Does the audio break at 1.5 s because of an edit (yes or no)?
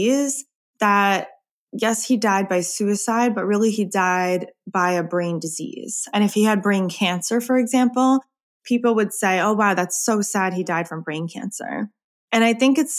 no